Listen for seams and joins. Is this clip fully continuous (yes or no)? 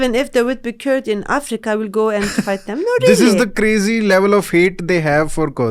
yes